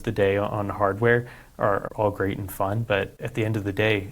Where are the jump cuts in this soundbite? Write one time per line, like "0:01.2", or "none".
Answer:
0:01.8
0:03.2